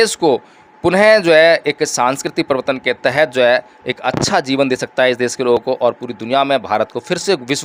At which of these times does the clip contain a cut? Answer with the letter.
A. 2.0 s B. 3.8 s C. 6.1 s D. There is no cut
D